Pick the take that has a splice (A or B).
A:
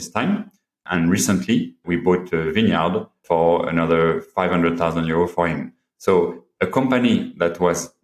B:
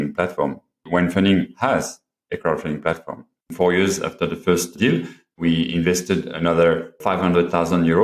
B